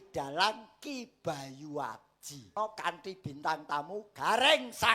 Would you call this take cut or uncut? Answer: cut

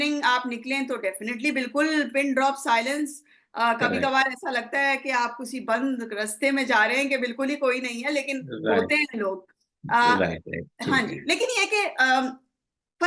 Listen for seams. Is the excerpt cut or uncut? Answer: uncut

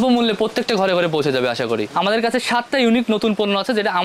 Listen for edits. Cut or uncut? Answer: cut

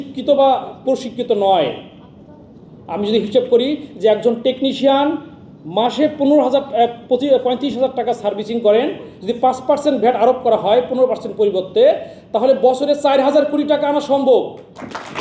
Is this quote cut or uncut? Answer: uncut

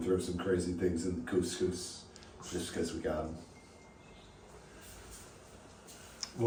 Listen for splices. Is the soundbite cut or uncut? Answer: uncut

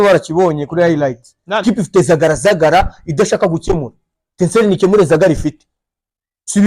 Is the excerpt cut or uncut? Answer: cut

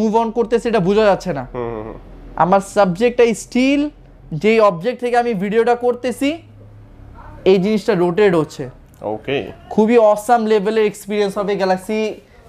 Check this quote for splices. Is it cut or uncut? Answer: uncut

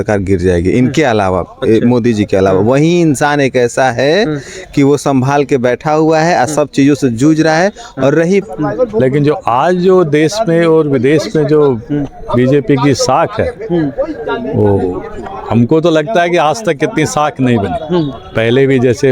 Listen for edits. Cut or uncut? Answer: cut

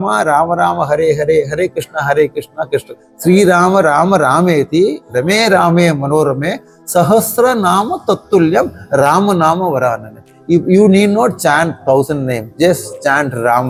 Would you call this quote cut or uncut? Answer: uncut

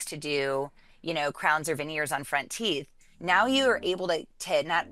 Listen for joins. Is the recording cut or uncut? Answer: uncut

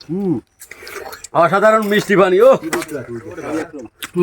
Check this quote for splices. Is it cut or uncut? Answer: cut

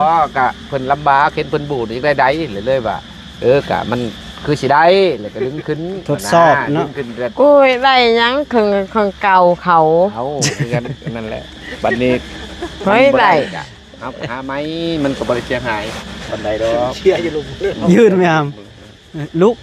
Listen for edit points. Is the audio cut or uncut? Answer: uncut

